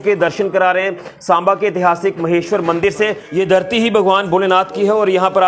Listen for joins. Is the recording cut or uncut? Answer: cut